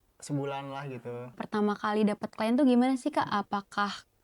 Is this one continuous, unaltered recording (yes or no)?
no